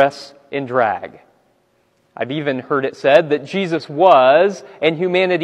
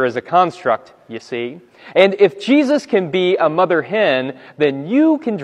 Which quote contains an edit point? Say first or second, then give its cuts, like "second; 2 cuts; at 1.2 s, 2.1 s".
first; 1 cut; at 1.4 s